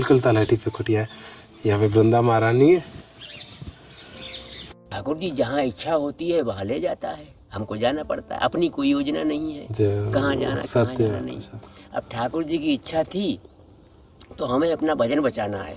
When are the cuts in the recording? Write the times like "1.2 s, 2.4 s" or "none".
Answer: 4.9 s